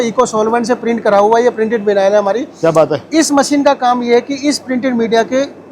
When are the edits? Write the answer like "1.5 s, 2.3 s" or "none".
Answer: none